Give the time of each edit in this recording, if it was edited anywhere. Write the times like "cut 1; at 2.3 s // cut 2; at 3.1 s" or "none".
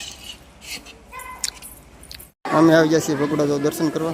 cut 1; at 2.2 s

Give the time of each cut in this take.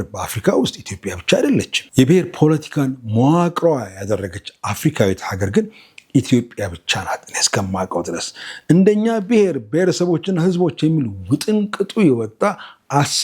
cut 1; at 1.8 s

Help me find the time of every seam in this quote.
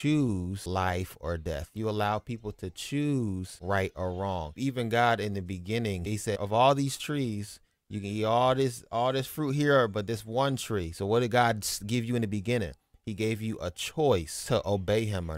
cut 1; at 4.6 s // cut 2; at 6.2 s // cut 3; at 14.3 s

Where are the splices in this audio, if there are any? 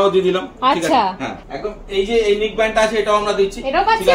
cut 1; at 1.3 s

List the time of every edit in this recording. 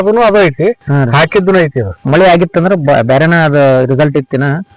cut 1; at 2.0 s

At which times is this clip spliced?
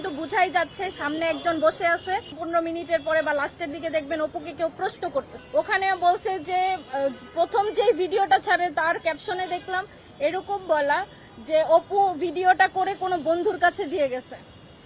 cut 1; at 2.4 s // cut 2; at 5.4 s

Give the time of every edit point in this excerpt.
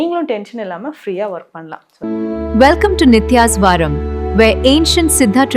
cut 1; at 1.8 s

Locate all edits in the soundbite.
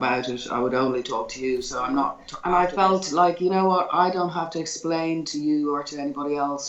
cut 1; at 2.3 s

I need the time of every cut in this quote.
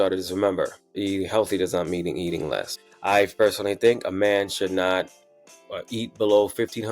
cut 1; at 0.9 s // cut 2; at 2.7 s

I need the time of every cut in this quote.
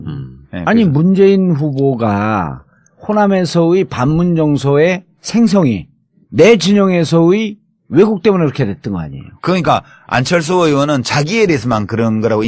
none

